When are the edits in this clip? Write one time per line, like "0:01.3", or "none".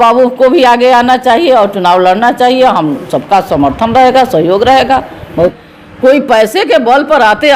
0:05.5